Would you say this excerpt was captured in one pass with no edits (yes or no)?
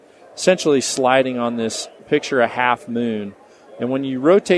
yes